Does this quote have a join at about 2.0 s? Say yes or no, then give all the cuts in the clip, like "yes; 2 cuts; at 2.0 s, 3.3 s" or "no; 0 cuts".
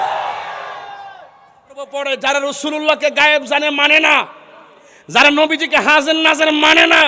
yes; 1 cut; at 2.0 s